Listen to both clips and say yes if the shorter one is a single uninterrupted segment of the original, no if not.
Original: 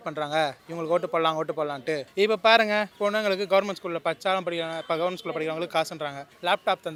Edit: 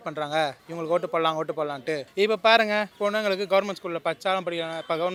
yes